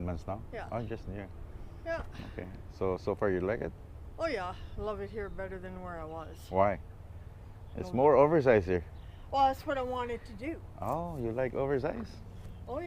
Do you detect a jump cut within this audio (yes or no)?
no